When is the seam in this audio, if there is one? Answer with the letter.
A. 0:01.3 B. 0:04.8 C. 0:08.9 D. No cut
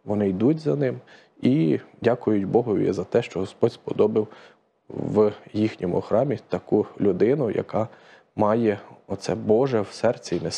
D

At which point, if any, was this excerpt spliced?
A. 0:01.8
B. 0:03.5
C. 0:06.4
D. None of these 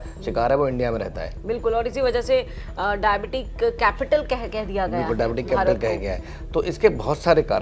D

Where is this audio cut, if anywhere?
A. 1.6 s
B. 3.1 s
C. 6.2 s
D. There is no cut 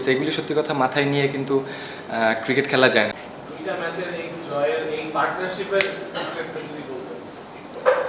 B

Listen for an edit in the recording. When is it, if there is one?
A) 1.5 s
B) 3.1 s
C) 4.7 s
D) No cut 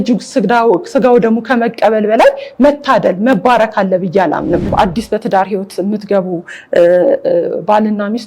C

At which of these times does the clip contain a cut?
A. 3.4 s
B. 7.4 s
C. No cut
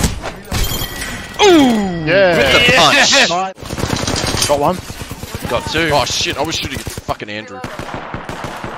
A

